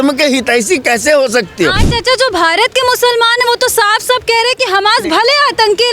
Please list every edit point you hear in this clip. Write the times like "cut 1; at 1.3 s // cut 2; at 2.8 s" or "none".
cut 1; at 1.8 s